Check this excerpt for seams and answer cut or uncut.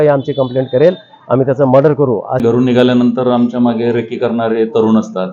cut